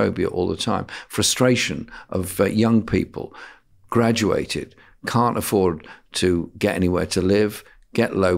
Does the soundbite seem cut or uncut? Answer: uncut